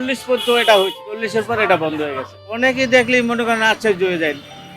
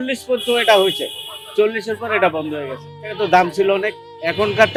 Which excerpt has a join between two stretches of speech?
first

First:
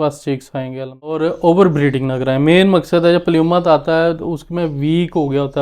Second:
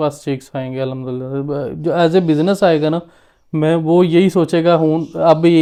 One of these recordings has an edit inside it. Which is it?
first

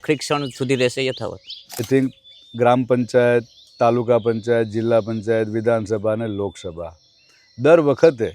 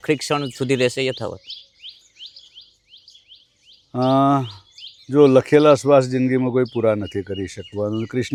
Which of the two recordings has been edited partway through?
first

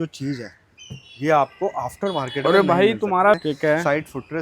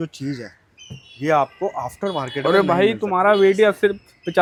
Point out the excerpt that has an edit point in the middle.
first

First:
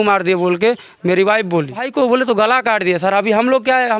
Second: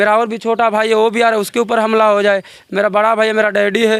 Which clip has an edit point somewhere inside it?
first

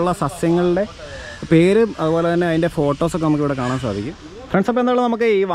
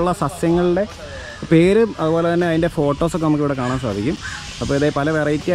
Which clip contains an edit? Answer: first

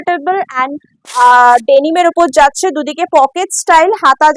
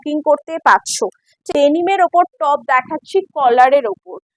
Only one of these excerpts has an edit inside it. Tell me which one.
second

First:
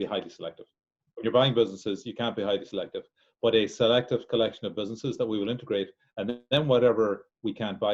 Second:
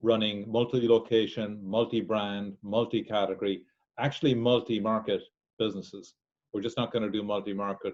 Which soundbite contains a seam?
first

